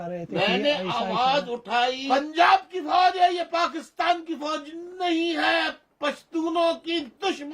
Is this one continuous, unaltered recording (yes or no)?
no